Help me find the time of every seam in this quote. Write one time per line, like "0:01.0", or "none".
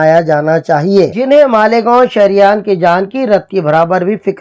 0:01.2